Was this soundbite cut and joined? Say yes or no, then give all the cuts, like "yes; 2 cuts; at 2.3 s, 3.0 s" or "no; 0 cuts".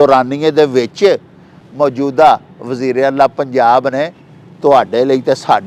no; 0 cuts